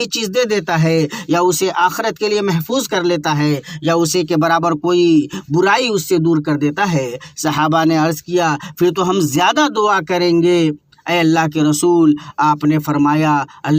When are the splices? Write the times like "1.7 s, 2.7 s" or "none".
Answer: none